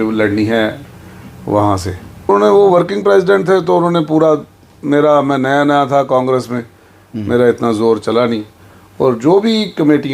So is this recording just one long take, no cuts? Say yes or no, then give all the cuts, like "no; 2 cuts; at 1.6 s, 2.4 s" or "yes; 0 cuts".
no; 1 cut; at 2.3 s